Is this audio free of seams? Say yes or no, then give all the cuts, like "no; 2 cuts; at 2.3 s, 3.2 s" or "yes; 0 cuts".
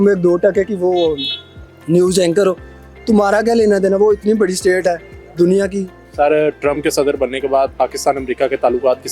yes; 0 cuts